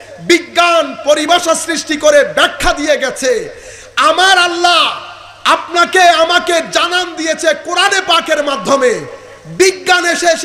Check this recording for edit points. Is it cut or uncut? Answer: uncut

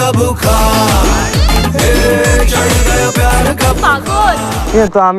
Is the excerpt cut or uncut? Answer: uncut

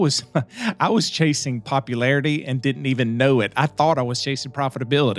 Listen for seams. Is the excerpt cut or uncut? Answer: uncut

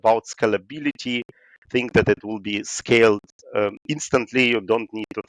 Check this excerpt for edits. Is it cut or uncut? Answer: uncut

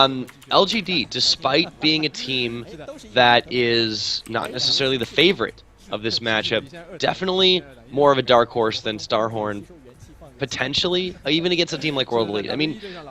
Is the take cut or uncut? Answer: uncut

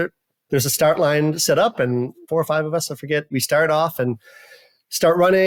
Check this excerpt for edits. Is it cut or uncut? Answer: uncut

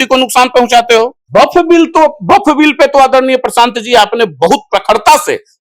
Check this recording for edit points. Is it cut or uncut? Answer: cut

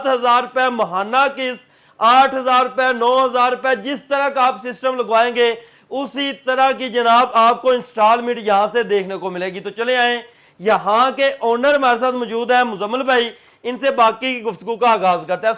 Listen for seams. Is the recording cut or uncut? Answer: uncut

